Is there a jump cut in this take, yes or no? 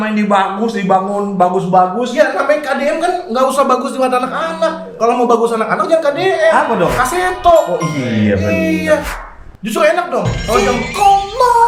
no